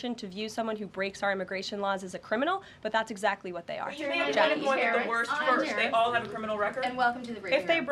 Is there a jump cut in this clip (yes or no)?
no